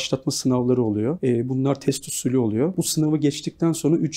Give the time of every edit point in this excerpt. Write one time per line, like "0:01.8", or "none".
0:01.2
0:02.7